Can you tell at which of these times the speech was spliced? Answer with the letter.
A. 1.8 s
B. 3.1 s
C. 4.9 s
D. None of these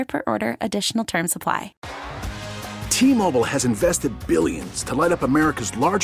A